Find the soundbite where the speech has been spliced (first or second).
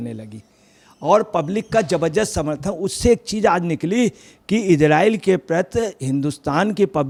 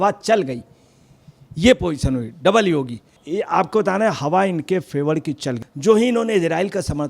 second